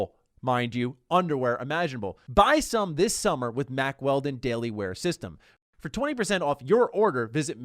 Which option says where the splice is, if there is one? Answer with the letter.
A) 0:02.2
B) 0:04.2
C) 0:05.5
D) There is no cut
A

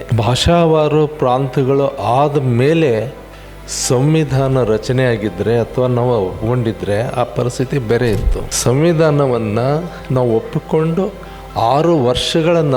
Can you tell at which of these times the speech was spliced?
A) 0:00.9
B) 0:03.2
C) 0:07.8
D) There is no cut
D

